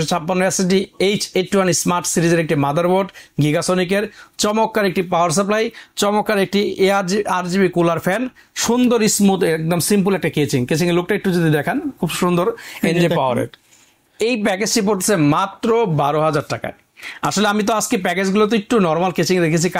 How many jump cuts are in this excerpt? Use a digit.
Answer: 0